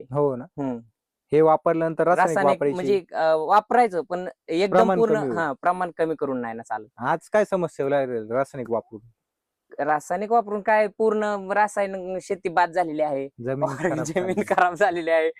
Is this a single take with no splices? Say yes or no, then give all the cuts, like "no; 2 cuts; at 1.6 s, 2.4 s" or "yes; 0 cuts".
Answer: yes; 0 cuts